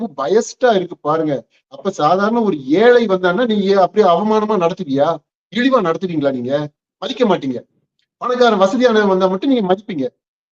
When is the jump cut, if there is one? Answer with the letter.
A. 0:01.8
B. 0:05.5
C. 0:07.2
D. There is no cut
D